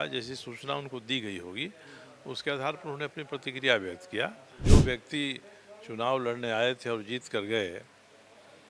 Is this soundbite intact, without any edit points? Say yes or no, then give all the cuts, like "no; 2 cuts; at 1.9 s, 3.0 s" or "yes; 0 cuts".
no; 1 cut; at 4.6 s